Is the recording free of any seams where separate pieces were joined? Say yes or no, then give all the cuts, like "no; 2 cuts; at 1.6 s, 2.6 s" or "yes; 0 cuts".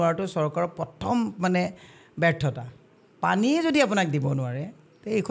yes; 0 cuts